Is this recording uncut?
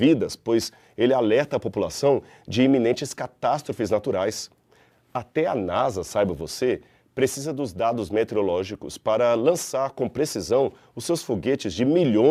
yes; 0 cuts

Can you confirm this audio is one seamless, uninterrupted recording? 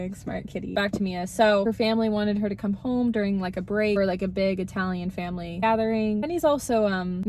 yes; 0 cuts

